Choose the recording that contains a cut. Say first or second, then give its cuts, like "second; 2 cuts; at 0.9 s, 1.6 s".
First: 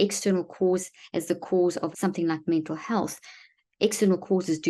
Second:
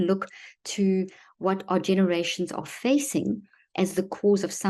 first; 1 cut; at 1.9 s